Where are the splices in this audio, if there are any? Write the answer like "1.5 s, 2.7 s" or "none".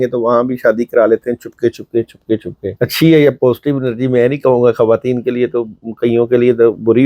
2.6 s